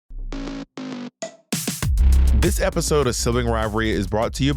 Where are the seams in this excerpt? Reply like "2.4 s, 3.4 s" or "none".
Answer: none